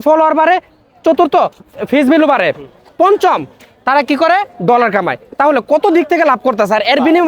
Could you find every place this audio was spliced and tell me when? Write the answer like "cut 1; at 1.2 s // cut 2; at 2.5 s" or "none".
cut 1; at 1.7 s